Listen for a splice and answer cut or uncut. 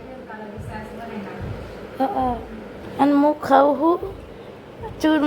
cut